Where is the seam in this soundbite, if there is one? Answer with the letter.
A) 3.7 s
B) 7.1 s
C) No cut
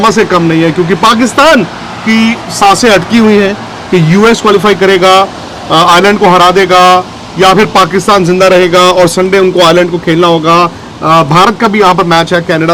C